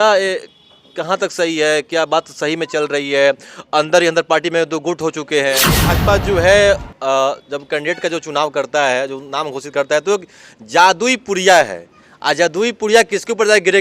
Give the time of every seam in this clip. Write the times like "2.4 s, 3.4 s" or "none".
5.7 s